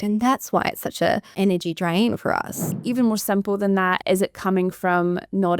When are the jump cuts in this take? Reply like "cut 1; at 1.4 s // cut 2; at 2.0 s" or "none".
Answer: cut 1; at 1.3 s // cut 2; at 2.7 s